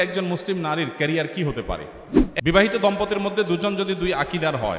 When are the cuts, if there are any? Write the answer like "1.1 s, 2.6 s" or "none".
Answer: 2.3 s

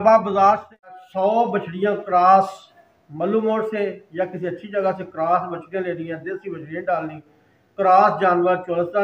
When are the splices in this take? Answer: 1.0 s

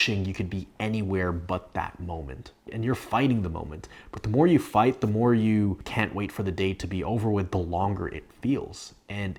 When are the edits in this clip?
none

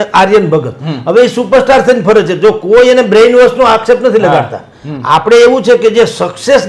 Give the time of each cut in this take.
none

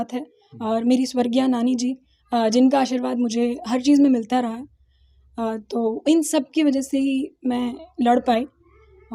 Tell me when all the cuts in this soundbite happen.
none

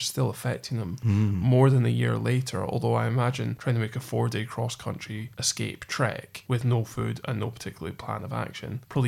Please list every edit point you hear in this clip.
none

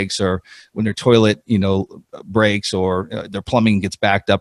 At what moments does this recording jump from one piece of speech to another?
none

